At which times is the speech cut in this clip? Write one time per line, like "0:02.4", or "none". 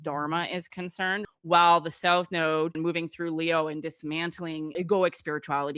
0:01.2
0:02.8
0:04.7